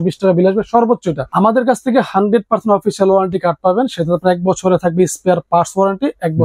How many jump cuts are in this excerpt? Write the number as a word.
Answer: one